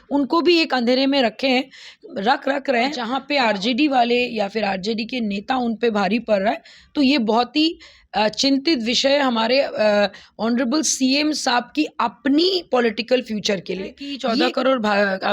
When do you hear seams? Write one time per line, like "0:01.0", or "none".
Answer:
0:03.1
0:14.1